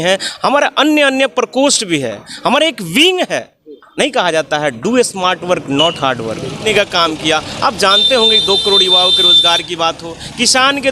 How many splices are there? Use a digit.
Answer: 1